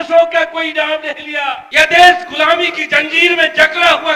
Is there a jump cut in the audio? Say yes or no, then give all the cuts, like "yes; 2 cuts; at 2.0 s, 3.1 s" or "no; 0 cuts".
yes; 1 cut; at 1.6 s